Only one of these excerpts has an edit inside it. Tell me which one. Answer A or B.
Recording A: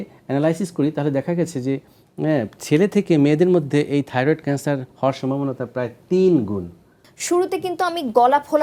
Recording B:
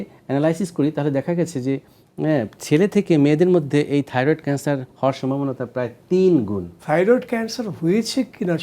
B